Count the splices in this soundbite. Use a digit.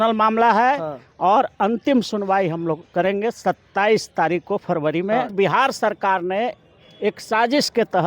1